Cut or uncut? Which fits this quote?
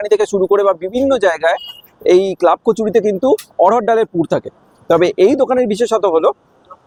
uncut